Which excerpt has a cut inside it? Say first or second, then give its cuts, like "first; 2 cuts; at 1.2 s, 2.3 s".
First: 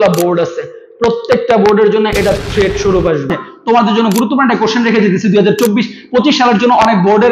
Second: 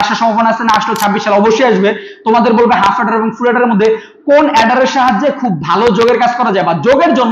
first; 1 cut; at 3.4 s